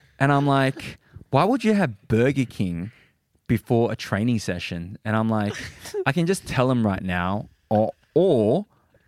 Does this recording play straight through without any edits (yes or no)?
yes